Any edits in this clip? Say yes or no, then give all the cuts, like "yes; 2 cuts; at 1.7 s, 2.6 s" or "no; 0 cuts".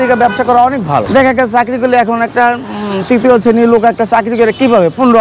yes; 1 cut; at 1.1 s